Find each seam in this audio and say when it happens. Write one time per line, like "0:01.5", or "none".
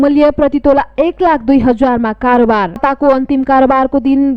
0:02.8